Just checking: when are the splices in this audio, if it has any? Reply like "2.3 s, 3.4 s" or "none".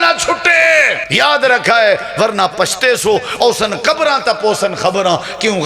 1.0 s